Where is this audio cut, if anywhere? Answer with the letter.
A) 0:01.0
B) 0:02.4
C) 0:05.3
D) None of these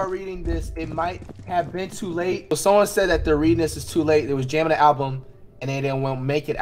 B